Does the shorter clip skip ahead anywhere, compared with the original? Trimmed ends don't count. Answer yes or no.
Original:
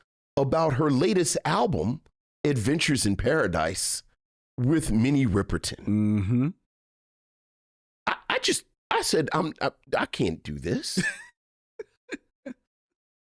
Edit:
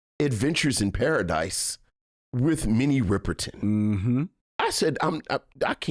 yes